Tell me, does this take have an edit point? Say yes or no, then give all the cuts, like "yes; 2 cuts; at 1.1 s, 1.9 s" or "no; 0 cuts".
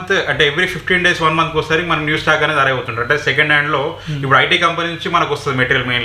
no; 0 cuts